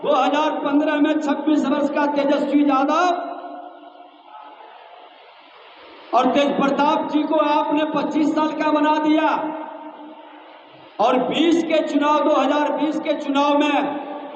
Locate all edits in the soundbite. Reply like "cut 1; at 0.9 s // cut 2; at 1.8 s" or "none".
none